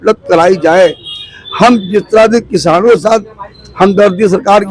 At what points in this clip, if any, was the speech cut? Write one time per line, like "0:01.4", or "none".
none